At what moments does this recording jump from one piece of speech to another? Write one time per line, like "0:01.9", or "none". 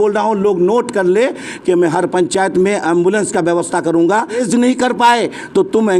0:04.4